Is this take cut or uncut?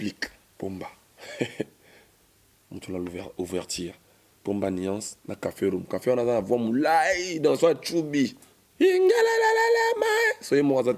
uncut